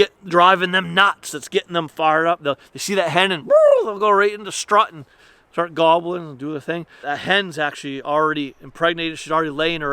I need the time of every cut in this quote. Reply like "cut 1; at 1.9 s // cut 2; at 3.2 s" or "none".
cut 1; at 7.0 s